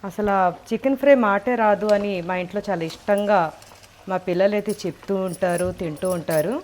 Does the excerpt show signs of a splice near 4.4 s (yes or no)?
no